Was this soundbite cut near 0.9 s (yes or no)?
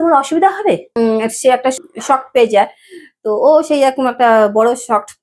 yes